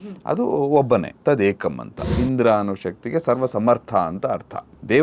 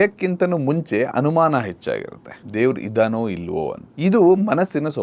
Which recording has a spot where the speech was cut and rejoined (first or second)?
first